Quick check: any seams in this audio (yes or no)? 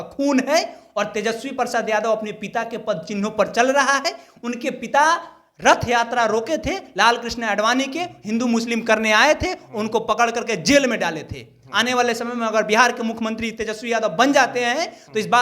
no